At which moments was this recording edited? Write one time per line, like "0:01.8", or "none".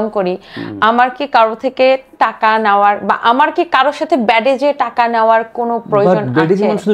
none